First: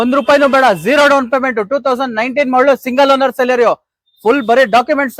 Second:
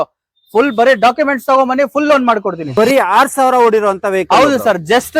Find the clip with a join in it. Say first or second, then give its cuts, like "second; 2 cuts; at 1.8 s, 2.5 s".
second; 1 cut; at 2.6 s